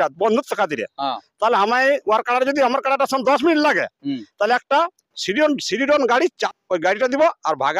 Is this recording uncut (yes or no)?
no